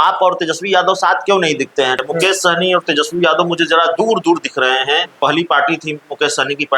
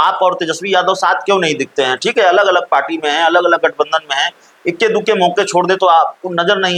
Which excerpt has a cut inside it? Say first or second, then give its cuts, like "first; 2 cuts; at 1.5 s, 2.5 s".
first; 2 cuts; at 2.0 s, 5.2 s